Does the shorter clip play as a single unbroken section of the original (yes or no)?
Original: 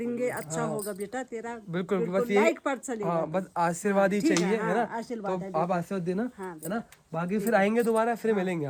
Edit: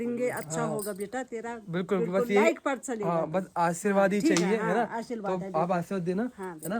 yes